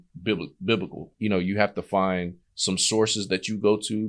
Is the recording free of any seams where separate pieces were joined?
no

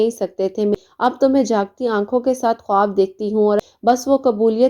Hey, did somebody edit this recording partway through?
yes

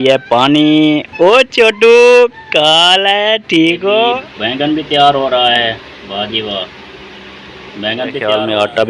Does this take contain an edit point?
yes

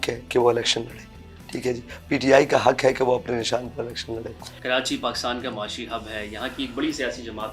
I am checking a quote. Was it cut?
no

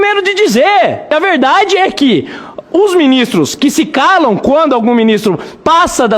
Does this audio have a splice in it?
yes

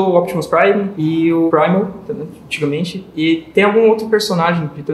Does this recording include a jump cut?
yes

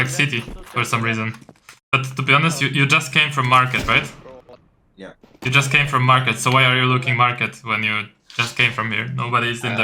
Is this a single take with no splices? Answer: yes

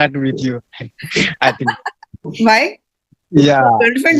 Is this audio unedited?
no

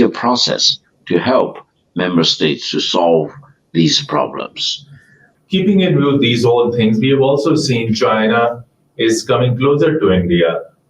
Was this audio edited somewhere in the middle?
yes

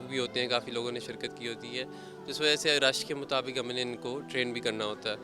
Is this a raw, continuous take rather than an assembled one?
yes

